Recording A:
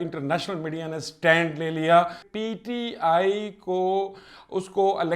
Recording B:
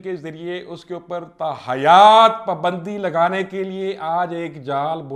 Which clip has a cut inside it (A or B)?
A